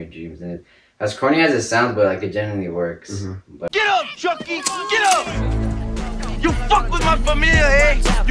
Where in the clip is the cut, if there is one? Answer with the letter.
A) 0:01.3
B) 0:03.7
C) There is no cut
B